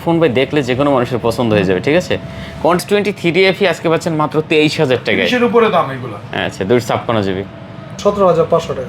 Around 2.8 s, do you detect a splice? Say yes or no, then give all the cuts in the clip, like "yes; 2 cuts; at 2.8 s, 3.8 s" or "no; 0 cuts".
yes; 2 cuts; at 2.8 s, 8.0 s